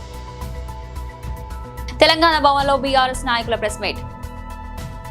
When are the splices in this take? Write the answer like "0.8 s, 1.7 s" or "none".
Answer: 1.8 s